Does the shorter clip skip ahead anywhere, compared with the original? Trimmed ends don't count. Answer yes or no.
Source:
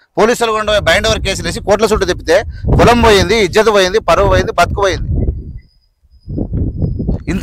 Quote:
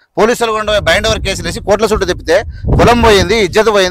no